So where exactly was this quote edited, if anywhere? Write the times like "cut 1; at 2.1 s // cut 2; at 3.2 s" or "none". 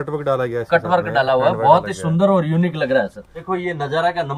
cut 1; at 3.4 s